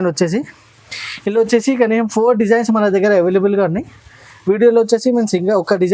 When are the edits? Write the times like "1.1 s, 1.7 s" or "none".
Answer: none

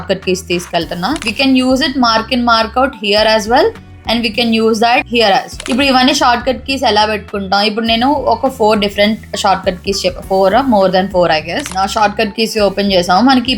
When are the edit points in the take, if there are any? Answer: 1.3 s, 5.6 s, 11.6 s

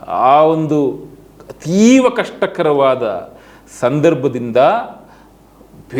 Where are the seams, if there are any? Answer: none

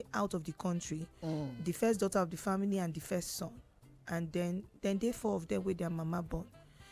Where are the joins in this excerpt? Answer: none

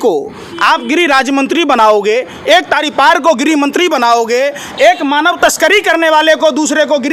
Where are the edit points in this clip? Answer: none

